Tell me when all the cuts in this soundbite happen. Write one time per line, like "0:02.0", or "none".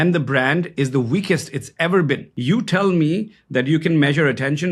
0:02.3

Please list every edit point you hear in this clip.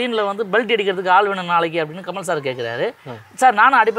none

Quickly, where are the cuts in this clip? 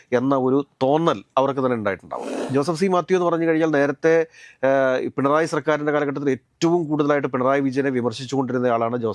0:02.2

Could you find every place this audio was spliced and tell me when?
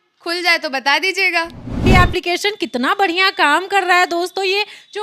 0:01.8

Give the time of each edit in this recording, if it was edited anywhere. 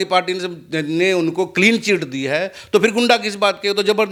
none

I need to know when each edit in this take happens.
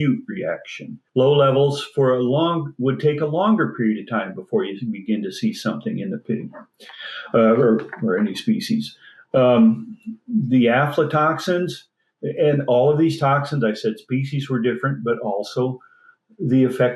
0:01.0

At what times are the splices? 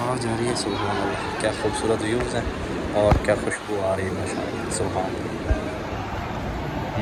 none

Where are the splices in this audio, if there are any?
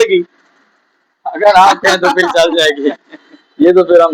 none

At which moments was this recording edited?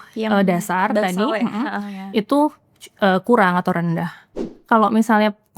0:04.4

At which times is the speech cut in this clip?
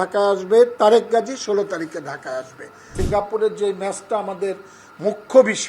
0:02.8

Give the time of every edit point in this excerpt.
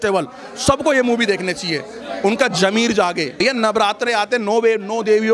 0:03.4

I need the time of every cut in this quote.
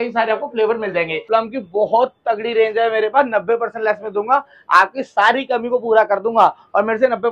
0:01.2

